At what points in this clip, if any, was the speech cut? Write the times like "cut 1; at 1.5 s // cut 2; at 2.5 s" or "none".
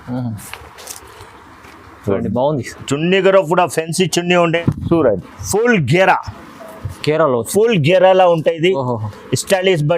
cut 1; at 4.6 s